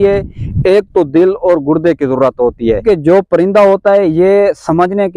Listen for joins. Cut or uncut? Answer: cut